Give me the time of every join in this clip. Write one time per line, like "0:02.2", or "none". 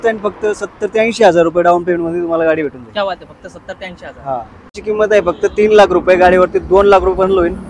0:04.8